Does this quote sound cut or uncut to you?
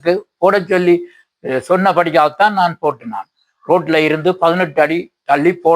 uncut